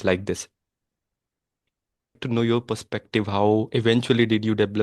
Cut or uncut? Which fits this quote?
cut